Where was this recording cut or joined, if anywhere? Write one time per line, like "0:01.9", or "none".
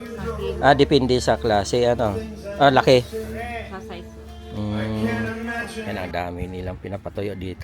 0:05.9